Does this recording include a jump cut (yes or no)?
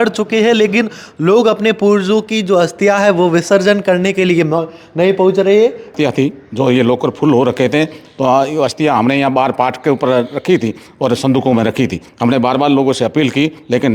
yes